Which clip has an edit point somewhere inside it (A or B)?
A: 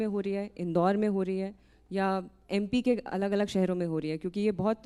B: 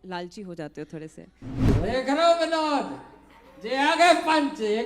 B